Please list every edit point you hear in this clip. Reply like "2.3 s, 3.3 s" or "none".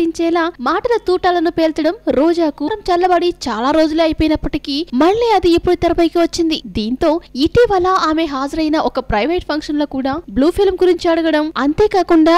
none